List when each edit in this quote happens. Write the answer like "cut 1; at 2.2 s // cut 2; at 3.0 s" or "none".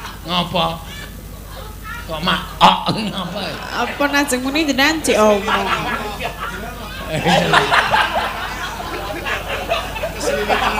none